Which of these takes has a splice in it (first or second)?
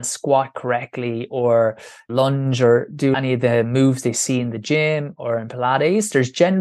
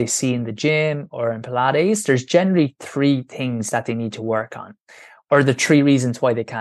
first